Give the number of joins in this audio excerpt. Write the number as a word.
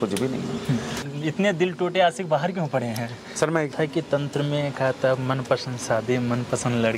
two